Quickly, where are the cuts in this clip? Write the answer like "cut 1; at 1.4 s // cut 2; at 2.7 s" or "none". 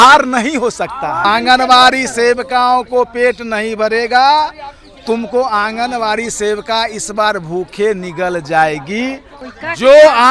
cut 1; at 1.2 s // cut 2; at 9.3 s